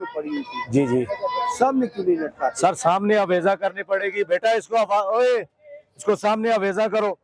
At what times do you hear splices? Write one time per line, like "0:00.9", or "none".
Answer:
none